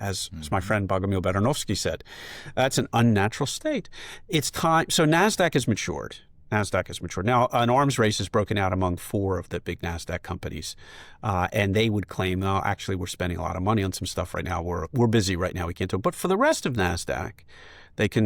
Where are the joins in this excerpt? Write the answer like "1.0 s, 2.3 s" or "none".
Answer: none